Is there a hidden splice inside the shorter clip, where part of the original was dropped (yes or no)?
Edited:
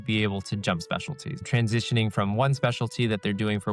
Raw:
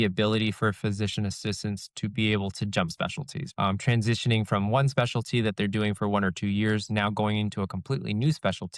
yes